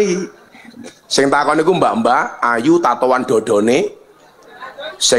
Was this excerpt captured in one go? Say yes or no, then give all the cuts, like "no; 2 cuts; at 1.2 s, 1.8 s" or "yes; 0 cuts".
yes; 0 cuts